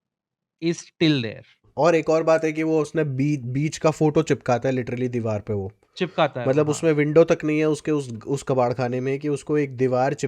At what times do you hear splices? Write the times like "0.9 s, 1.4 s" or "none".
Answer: 1.6 s